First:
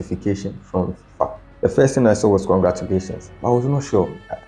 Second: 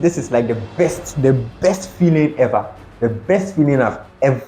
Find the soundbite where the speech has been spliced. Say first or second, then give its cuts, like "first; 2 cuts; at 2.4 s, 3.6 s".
first; 1 cut; at 1.4 s